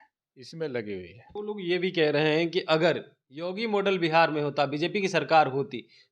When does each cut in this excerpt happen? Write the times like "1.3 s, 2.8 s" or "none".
1.2 s

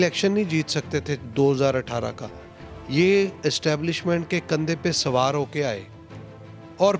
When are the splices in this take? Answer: none

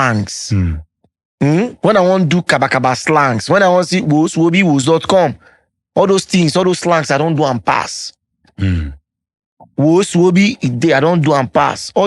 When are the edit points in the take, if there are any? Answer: none

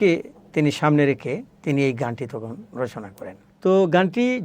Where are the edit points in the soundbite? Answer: 1.5 s, 3.4 s

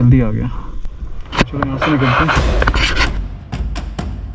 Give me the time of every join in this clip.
2.8 s

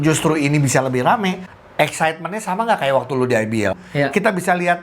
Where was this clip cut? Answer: 1.5 s, 3.8 s

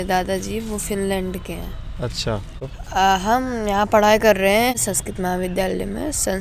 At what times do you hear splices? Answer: 2.5 s, 4.7 s

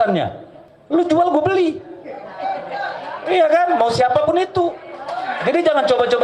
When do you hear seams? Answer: none

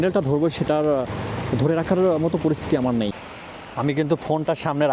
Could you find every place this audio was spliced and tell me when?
3.2 s

